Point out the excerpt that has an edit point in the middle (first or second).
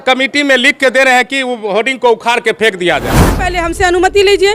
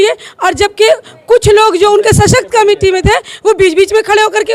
first